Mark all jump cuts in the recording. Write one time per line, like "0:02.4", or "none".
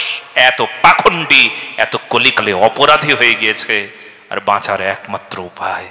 none